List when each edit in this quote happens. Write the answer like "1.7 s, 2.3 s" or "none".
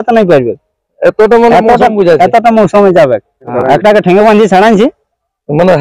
3.5 s